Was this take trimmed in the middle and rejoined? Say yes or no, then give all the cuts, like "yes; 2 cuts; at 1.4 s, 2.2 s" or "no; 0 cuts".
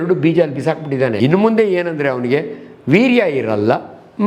yes; 1 cut; at 1.1 s